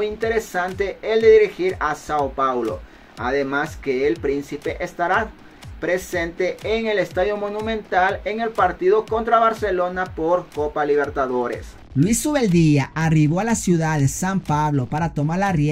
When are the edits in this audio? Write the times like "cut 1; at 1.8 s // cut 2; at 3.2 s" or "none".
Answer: none